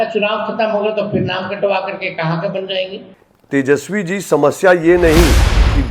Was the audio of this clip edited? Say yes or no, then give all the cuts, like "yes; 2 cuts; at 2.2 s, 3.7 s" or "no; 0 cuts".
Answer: yes; 1 cut; at 3.3 s